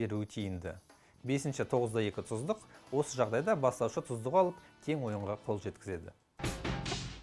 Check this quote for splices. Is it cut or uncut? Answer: cut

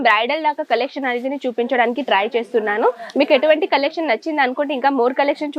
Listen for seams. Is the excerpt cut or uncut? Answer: uncut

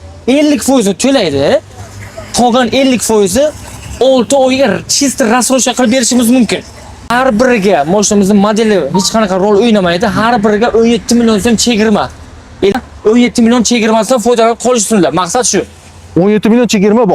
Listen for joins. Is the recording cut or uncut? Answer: cut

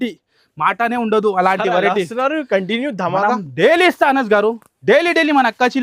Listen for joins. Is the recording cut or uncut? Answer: uncut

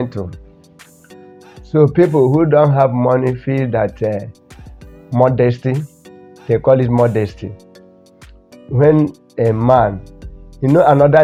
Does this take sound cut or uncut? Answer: uncut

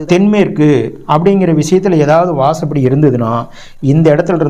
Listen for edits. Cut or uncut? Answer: uncut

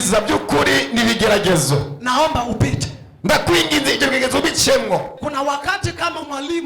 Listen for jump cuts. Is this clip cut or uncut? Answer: cut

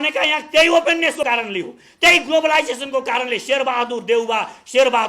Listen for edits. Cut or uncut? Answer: cut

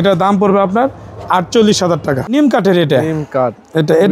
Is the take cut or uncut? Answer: cut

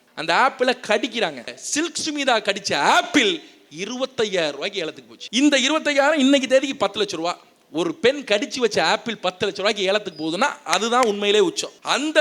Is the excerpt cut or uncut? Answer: cut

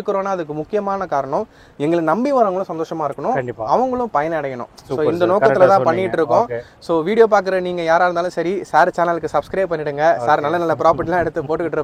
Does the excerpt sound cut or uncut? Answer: uncut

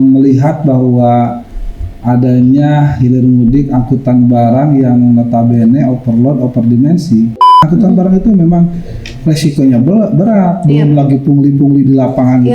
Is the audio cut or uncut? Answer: cut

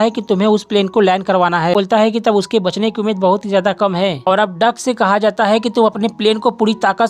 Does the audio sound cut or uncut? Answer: cut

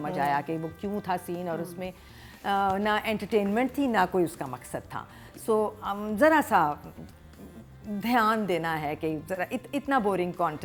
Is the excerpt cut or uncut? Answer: uncut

